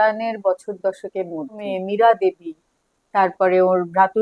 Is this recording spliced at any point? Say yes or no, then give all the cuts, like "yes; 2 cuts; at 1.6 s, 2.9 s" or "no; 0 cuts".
yes; 1 cut; at 1.7 s